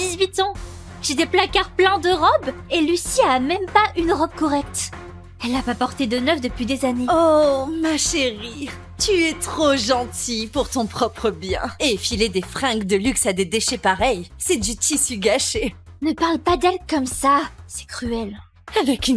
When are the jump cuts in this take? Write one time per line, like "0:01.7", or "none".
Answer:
0:11.7